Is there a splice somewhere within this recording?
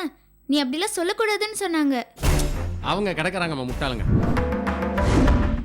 yes; 1 cut; at 4.2 s

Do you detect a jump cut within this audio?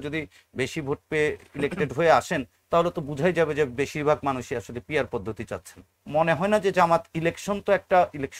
yes; 1 cut; at 5.9 s

